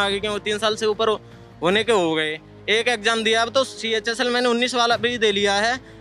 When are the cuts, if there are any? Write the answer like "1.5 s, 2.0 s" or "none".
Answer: none